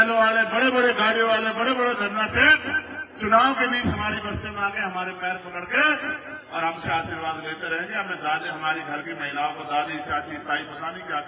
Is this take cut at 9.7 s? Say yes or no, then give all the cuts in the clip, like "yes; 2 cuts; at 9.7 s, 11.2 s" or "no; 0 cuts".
no; 0 cuts